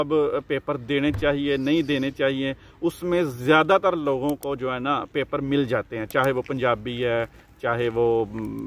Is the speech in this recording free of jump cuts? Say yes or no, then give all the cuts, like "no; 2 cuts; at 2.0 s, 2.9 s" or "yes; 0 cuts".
yes; 0 cuts